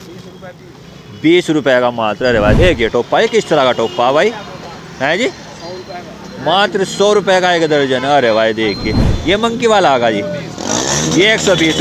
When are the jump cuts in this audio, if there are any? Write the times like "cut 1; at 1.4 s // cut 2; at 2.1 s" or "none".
cut 1; at 2.6 s // cut 2; at 9.1 s